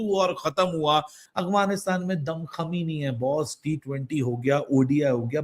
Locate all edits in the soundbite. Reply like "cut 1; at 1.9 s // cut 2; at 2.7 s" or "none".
cut 1; at 1.2 s